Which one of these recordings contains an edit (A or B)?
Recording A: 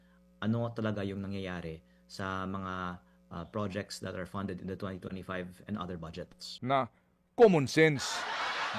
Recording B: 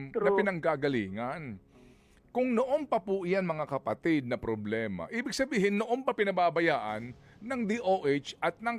A